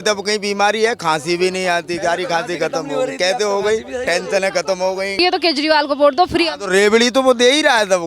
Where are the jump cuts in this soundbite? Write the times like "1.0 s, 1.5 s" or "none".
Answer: 5.2 s